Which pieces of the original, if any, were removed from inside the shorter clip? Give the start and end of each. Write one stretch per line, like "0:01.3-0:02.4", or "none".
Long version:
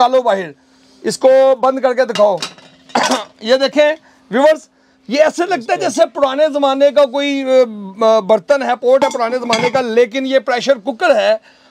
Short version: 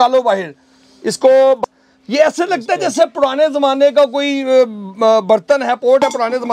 0:01.6-0:04.6